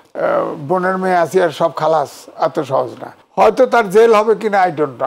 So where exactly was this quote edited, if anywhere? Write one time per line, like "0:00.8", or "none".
0:03.2